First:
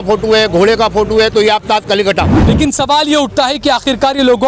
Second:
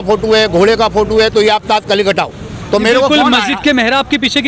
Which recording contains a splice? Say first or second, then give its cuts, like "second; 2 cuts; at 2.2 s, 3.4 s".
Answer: first; 1 cut; at 2.4 s